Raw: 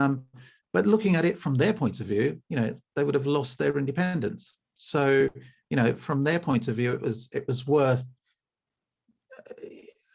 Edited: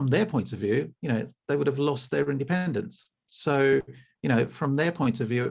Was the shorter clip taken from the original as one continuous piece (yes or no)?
yes